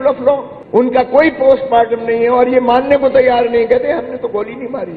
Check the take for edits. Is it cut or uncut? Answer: uncut